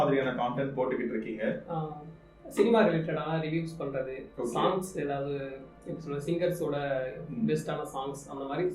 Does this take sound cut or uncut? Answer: uncut